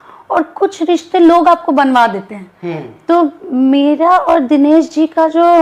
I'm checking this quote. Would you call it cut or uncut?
uncut